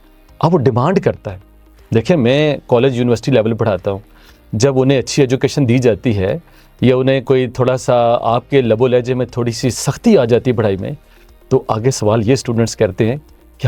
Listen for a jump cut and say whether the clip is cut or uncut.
uncut